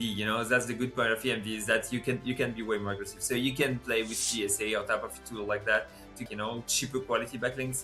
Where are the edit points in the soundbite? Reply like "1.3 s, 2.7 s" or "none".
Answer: 6.2 s